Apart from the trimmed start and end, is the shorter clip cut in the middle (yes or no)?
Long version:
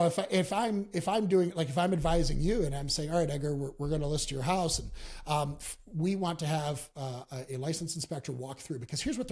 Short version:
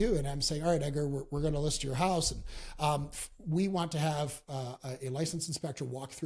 no